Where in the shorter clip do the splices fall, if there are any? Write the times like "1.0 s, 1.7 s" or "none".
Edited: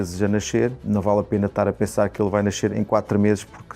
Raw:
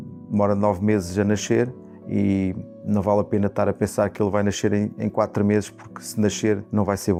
0.8 s, 2.7 s

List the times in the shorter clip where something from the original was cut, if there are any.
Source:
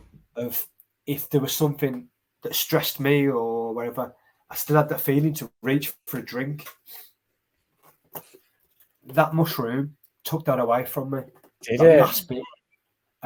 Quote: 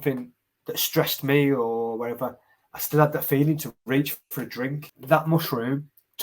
4.9 s

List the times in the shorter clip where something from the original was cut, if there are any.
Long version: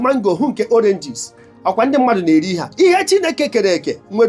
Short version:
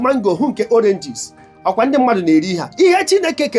none

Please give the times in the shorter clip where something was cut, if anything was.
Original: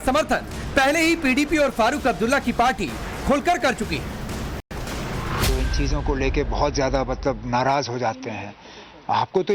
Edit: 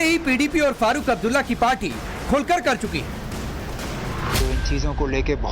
3.6 s

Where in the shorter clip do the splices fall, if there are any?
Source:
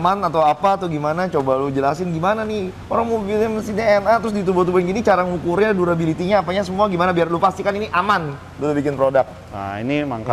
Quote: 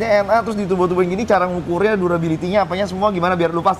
none

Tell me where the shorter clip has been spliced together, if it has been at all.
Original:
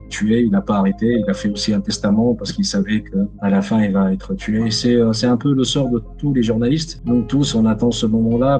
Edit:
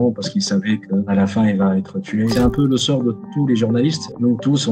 1.1 s, 2.3 s

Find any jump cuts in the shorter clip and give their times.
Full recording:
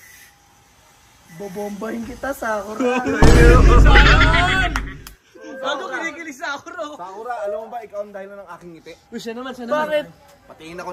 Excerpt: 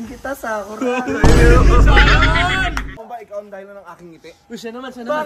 3.0 s

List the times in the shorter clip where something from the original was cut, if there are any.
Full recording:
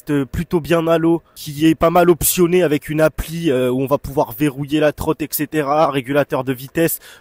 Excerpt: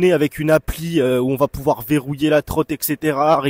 none

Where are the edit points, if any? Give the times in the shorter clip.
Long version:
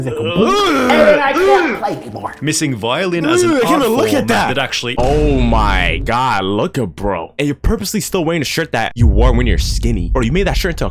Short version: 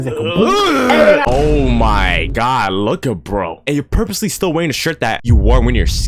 1.2 s

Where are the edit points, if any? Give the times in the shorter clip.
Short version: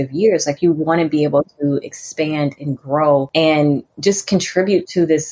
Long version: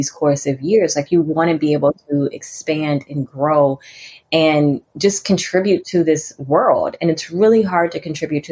3.3 s

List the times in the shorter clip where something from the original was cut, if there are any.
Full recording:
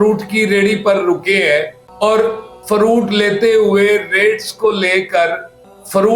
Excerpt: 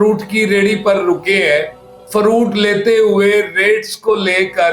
1.9 s

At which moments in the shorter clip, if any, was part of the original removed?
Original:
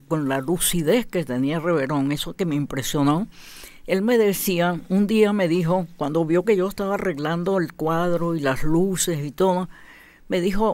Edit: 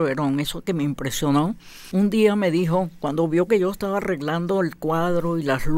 1.8 s

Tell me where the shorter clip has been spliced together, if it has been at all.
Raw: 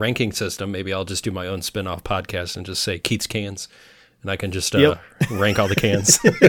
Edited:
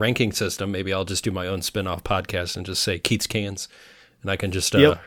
none

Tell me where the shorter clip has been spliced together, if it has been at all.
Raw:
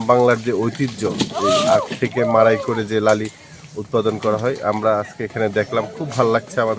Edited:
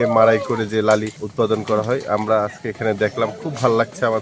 1.2 s

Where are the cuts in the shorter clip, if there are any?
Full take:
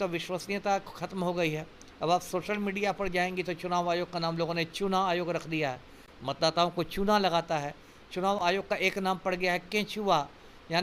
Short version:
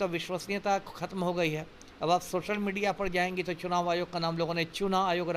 none

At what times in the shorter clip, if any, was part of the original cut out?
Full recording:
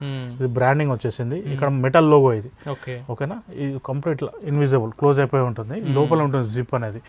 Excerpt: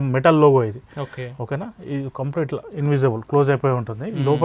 none

